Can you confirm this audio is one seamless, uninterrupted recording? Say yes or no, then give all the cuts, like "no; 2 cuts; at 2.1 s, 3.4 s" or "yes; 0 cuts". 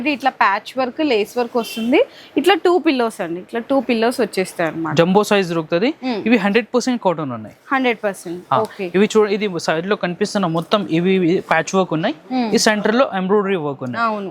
yes; 0 cuts